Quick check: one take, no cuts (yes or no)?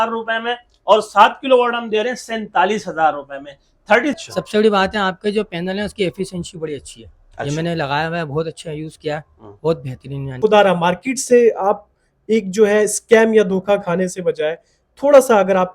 no